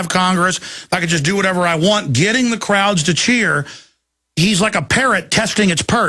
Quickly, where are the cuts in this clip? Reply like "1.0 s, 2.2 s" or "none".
3.8 s